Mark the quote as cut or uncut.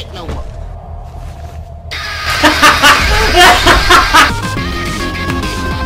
cut